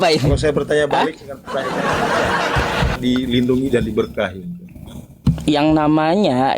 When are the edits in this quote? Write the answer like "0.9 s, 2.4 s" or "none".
3.0 s